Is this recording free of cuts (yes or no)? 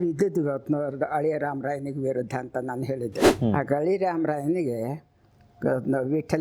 no